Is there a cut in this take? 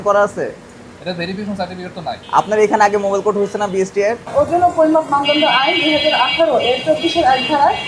yes; 2 cuts; at 2.2 s, 4.3 s

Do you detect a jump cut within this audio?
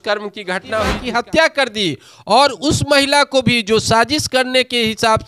yes; 1 cut; at 0.9 s

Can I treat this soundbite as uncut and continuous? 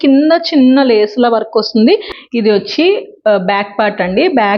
no; 1 cut; at 2.2 s

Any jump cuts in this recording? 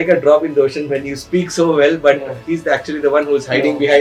no; 0 cuts

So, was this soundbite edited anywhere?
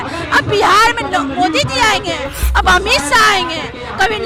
no; 0 cuts

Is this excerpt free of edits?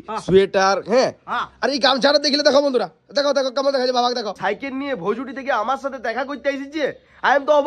no; 1 cut; at 4.4 s

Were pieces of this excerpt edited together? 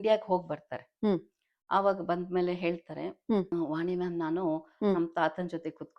yes; 1 cut; at 3.5 s

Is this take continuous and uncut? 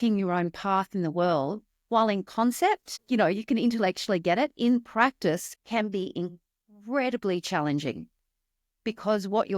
no; 2 cuts; at 2.9 s, 5.5 s

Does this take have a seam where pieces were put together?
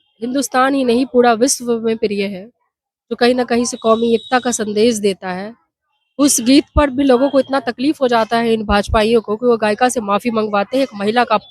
no; 0 cuts

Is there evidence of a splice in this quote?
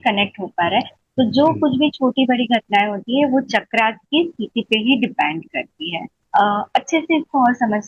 no; 0 cuts

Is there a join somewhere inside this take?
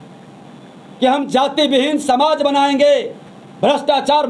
no; 0 cuts

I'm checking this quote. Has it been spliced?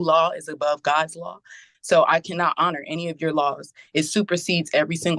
no; 0 cuts

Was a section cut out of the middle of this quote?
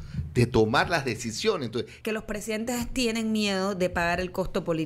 yes; 1 cut; at 1.9 s

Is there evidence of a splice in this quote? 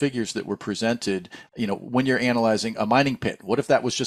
no; 0 cuts

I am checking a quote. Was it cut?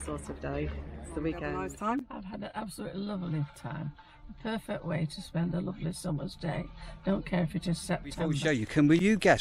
yes; 2 cuts; at 1.5 s, 8.4 s

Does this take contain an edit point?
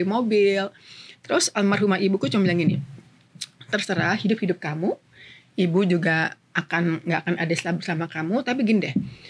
no; 0 cuts

